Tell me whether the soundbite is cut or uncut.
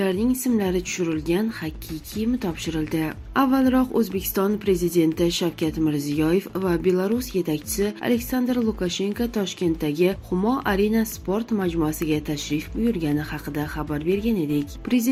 uncut